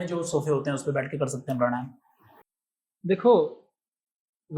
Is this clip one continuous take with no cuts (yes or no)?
yes